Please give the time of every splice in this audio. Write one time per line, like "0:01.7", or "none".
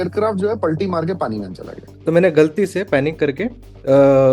0:01.9